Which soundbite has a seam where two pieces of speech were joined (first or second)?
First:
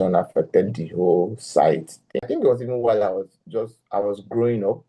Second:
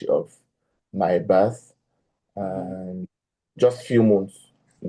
first